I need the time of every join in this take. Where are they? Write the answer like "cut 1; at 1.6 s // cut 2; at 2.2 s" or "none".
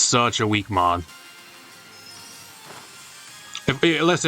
cut 1; at 1.1 s